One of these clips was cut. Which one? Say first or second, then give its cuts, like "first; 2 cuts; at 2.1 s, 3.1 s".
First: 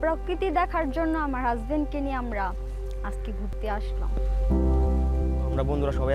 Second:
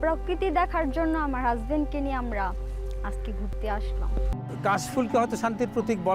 second; 1 cut; at 4.4 s